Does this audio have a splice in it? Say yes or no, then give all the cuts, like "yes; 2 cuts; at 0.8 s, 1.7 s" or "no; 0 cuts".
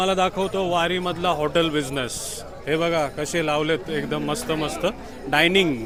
no; 0 cuts